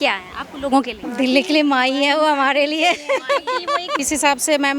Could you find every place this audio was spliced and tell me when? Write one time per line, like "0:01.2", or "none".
0:01.0
0:04.0